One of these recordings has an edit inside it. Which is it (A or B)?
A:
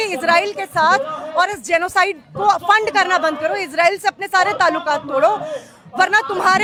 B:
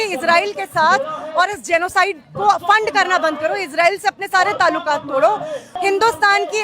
B